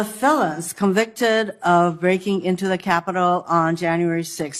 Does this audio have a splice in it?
no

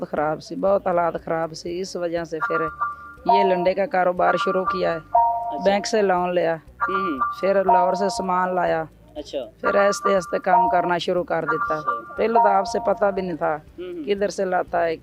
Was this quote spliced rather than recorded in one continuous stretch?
no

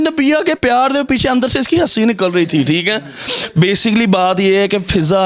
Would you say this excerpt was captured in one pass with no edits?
yes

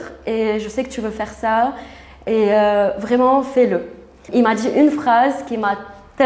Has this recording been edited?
yes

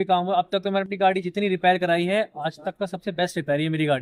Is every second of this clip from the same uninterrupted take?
yes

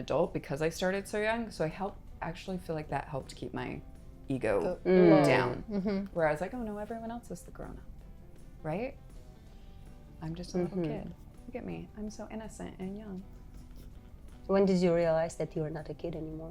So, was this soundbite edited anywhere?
no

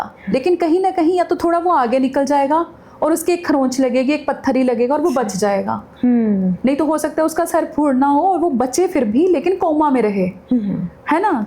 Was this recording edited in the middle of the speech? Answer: no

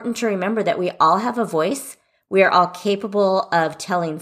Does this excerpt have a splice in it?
no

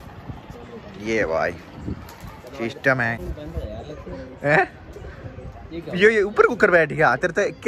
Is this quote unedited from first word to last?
no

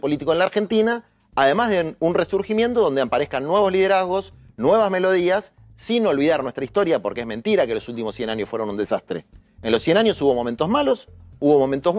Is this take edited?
no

